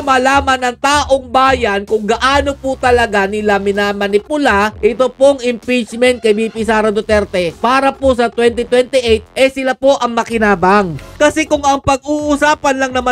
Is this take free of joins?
no; 1 cut; at 11.1 s

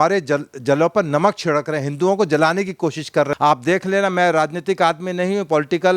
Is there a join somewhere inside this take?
yes; 1 cut; at 3.3 s

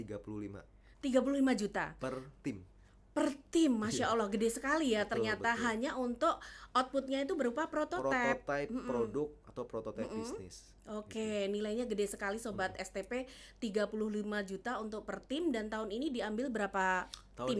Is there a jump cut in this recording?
no; 0 cuts

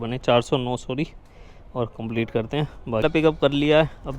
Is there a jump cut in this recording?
yes; 1 cut; at 3.0 s

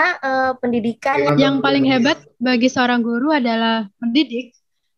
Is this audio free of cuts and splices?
no; 1 cut; at 1.2 s

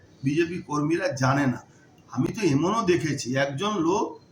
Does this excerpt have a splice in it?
no; 0 cuts

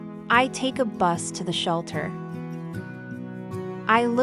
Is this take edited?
no; 0 cuts

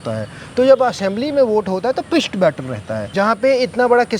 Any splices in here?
yes; 1 cut; at 3.1 s

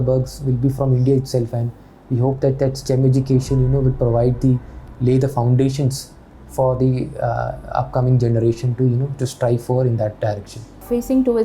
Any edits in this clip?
no; 0 cuts

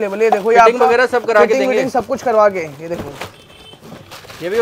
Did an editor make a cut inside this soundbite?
no; 0 cuts

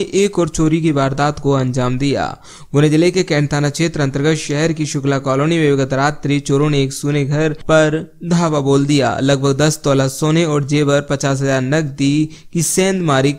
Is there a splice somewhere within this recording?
no; 0 cuts

